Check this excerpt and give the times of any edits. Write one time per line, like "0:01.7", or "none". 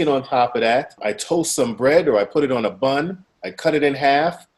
0:01.0